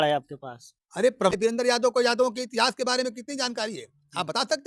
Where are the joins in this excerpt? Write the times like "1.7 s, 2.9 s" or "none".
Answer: 1.3 s